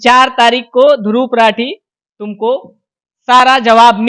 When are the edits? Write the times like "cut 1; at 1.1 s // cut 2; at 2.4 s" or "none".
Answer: none